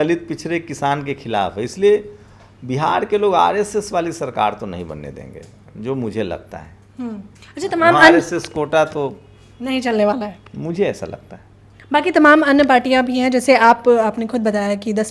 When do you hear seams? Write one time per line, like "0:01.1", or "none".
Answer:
none

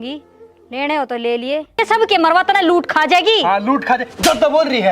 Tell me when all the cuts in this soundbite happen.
0:01.8

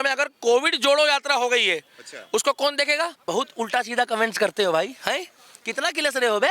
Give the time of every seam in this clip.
0:03.2

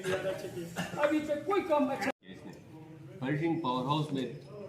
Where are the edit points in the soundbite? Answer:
0:02.3

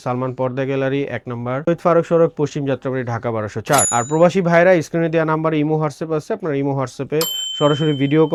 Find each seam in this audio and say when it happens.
none

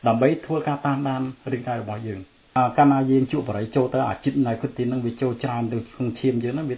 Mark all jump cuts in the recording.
0:02.6

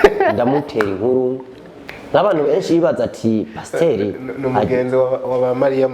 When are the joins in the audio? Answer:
none

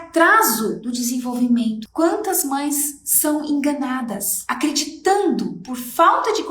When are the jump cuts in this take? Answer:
0:01.9

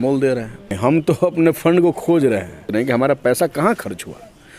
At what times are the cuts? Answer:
0:00.8
0:02.7

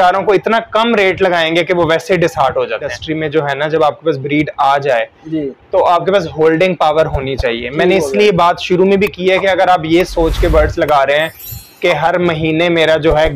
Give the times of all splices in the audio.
0:02.9

